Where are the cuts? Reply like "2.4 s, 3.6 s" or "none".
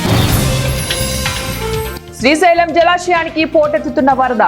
none